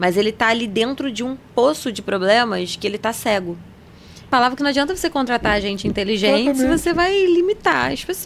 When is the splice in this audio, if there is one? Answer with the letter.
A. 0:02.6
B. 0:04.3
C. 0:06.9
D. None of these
B